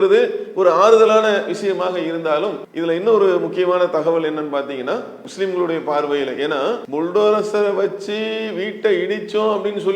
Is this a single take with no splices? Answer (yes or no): no